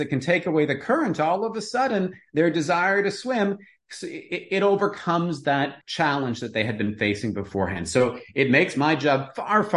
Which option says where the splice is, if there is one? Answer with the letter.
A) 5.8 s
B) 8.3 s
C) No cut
A